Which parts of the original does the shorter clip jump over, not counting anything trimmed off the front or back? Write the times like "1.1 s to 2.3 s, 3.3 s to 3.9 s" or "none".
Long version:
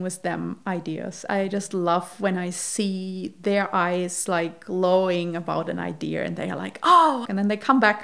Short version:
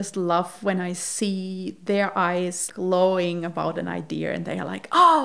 4.2 s to 4.5 s